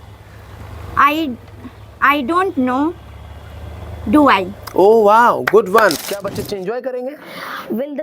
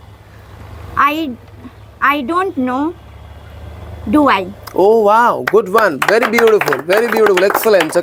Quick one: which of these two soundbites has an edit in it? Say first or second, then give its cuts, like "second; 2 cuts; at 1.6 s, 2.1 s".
first; 1 cut; at 6.0 s